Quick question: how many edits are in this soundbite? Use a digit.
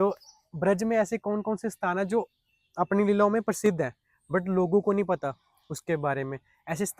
0